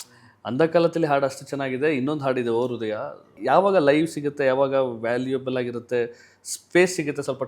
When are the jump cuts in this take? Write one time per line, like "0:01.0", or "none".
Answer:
0:03.3